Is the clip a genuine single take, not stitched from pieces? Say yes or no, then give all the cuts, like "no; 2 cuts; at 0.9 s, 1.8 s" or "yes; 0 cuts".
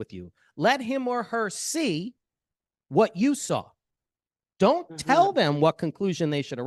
yes; 0 cuts